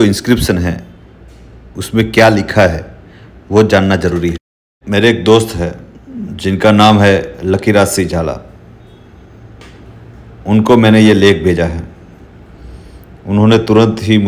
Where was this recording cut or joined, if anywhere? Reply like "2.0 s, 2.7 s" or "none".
4.8 s